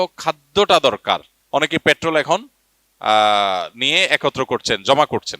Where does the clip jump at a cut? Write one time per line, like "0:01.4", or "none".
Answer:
0:01.3